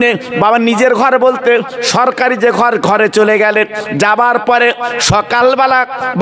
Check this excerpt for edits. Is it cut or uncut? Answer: uncut